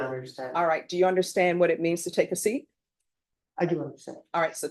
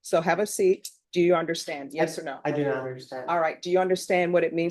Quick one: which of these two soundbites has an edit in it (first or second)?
second